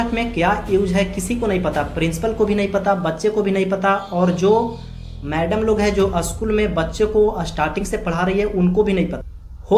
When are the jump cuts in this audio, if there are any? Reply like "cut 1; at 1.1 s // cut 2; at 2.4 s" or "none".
none